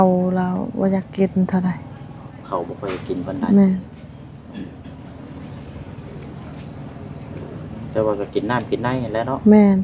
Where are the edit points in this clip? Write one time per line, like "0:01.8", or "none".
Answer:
none